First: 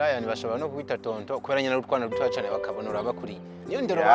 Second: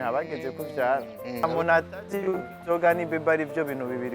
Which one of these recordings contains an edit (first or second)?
second